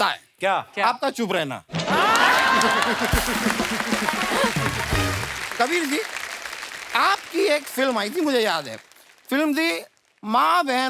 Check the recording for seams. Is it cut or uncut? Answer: uncut